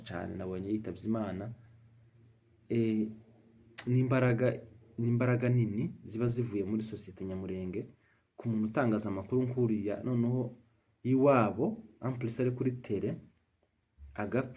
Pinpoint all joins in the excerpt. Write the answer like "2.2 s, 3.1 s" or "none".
none